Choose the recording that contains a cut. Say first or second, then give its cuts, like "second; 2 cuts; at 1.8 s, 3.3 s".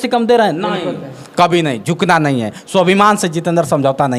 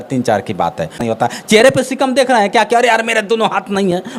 second; 1 cut; at 1.0 s